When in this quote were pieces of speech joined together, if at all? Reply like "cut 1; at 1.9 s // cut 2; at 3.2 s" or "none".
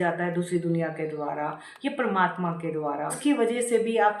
cut 1; at 3.2 s

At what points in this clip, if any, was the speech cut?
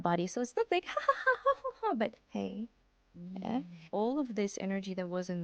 cut 1; at 3.8 s

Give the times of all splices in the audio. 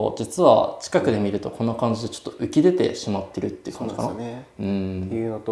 none

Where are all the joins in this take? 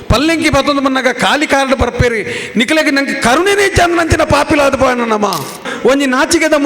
cut 1; at 5.7 s

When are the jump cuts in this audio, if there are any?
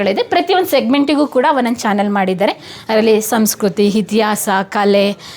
none

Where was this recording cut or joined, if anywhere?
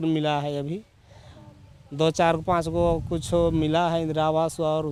none

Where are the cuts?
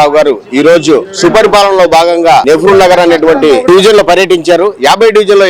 cut 1; at 2.4 s // cut 2; at 3.6 s

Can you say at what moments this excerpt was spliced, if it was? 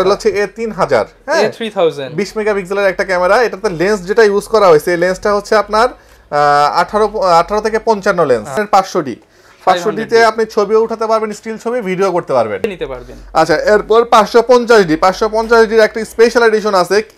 cut 1; at 8.5 s // cut 2; at 12.7 s

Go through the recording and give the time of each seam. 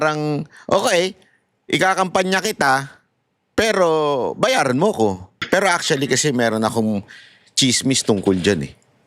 cut 1; at 5.4 s

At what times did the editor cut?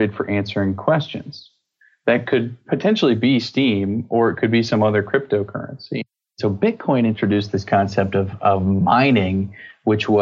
cut 1; at 6.4 s

